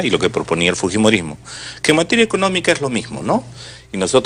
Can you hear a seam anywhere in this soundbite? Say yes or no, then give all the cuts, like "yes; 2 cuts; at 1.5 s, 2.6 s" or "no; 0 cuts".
yes; 1 cut; at 1.8 s